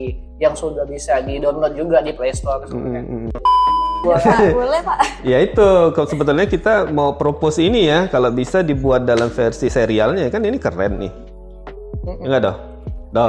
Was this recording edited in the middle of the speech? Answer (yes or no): yes